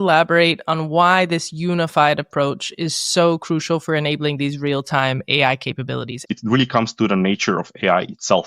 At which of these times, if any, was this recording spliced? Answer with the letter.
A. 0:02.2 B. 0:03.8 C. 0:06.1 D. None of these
C